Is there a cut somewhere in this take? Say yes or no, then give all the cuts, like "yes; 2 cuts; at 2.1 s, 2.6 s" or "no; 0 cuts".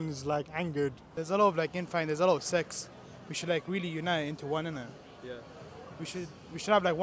yes; 1 cut; at 1.1 s